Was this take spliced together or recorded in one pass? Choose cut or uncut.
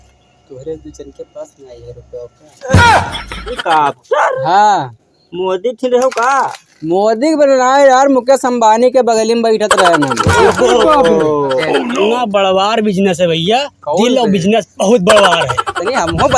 cut